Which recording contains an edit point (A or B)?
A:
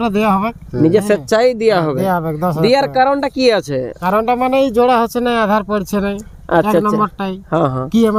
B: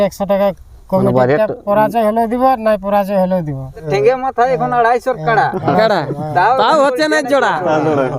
B